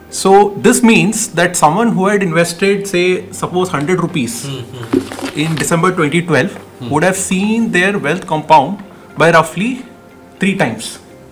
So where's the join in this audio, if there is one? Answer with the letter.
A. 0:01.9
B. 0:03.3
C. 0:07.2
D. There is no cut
D